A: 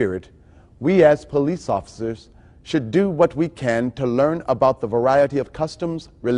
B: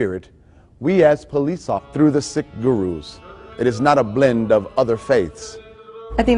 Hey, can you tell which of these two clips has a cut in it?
A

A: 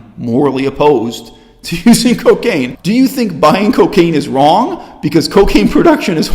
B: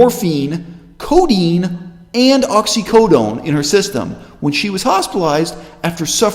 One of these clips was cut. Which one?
A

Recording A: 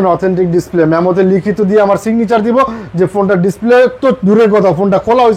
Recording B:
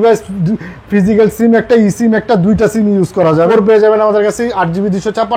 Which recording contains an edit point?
B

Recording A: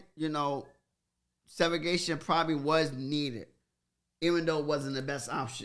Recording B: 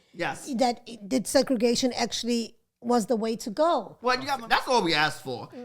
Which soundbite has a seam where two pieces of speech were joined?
B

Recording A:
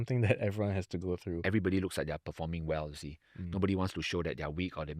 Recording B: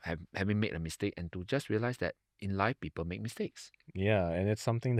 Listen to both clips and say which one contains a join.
A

